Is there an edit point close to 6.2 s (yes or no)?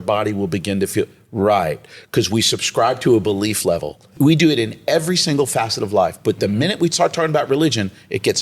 no